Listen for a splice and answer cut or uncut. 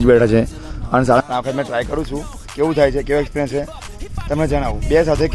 cut